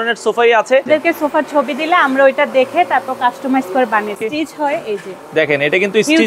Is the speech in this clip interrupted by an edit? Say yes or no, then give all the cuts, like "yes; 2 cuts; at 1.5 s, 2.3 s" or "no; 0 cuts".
yes; 2 cuts; at 0.9 s, 4.2 s